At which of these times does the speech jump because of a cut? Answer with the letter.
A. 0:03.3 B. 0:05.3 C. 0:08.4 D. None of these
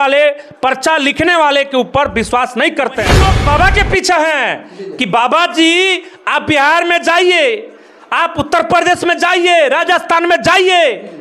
A